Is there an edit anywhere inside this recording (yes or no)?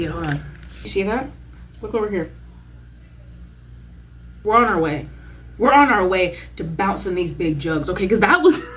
yes